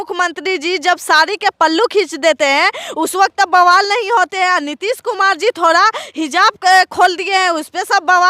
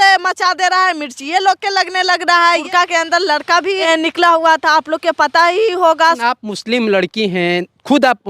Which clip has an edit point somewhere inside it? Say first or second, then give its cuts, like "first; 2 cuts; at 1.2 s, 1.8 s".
second; 3 cuts; at 2.6 s, 3.8 s, 6.2 s